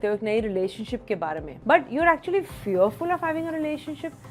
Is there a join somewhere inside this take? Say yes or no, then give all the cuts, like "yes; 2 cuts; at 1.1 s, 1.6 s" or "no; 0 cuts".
yes; 1 cut; at 1.5 s